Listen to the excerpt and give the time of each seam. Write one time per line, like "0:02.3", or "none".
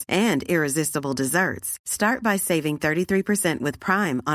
none